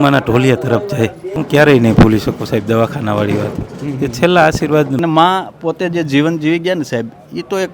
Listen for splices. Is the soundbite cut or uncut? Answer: cut